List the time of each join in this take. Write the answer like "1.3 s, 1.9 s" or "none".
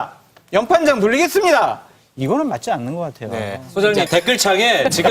4.1 s